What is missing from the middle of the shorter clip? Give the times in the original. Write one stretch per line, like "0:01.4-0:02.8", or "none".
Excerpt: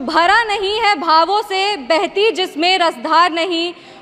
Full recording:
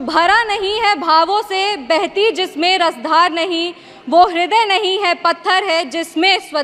none